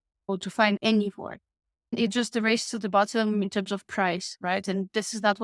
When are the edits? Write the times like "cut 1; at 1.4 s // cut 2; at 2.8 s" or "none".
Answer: cut 1; at 2.0 s